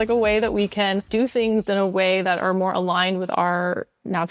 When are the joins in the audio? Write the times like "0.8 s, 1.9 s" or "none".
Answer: 1.1 s